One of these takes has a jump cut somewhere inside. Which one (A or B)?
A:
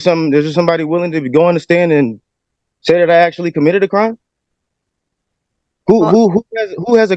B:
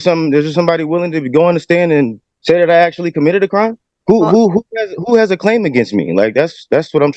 B